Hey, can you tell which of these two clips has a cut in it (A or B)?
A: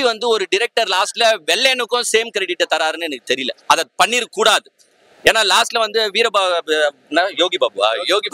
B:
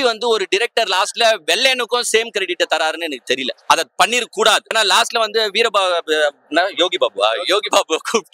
B